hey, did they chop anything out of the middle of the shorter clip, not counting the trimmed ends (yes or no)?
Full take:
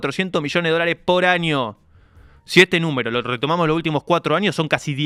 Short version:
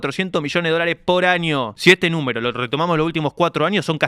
yes